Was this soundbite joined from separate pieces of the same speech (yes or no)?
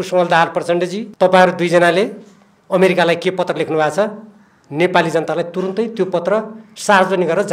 yes